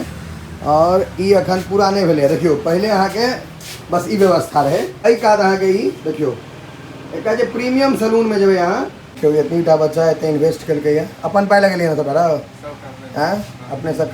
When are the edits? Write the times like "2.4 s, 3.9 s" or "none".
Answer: 5.0 s, 9.2 s